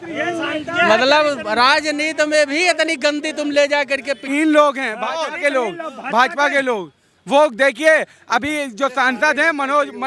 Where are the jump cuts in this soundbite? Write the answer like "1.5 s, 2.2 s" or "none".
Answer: 4.2 s